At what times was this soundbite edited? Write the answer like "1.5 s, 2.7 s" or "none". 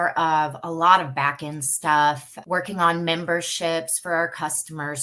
2.3 s